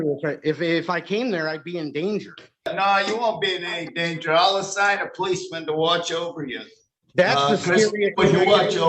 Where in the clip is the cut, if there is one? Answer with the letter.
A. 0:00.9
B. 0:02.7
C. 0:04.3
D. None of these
B